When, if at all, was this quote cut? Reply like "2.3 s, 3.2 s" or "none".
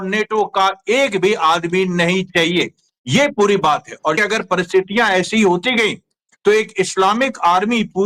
4.2 s